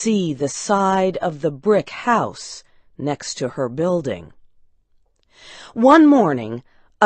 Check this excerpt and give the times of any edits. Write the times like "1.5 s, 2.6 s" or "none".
1.0 s